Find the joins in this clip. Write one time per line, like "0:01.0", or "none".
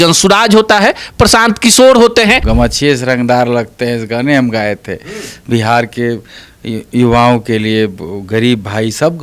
0:02.4